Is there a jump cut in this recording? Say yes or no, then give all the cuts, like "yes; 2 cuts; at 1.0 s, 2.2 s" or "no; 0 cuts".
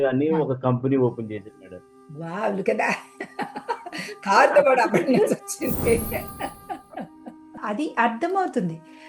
yes; 1 cut; at 7.6 s